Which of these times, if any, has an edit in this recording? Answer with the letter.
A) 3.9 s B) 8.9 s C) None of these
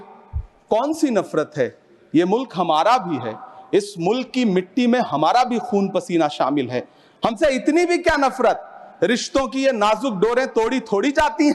C